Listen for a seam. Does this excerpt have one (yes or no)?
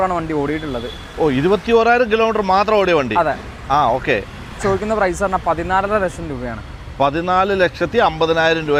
no